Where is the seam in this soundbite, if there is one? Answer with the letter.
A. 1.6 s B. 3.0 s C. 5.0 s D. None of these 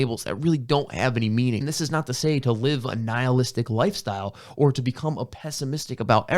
A